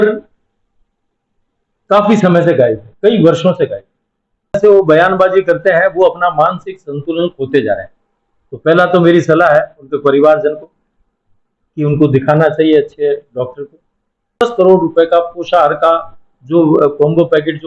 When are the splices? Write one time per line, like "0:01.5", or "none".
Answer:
0:04.6
0:14.4